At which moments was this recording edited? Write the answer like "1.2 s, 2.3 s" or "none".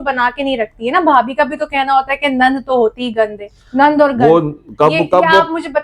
none

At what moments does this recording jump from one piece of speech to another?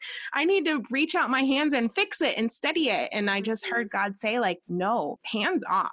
5.0 s

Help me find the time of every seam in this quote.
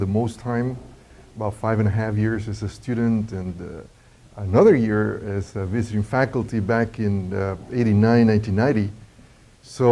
2.1 s

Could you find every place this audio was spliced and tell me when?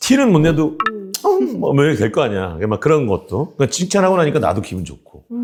none

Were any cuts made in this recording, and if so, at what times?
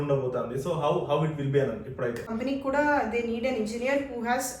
2.3 s

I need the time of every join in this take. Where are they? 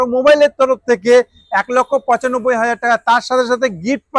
none

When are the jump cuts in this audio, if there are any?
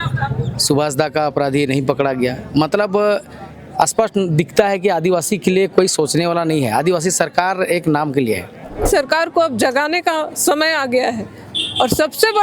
8.8 s

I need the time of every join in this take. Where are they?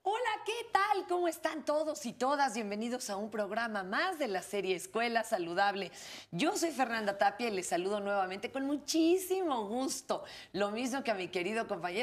none

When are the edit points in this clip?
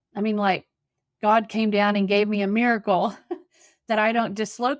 none

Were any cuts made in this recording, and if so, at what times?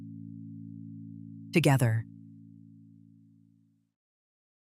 1.2 s

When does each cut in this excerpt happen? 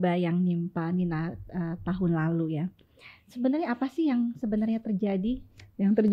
none

